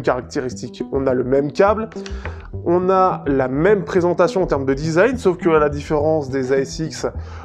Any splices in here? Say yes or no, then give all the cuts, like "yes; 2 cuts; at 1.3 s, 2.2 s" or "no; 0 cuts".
no; 0 cuts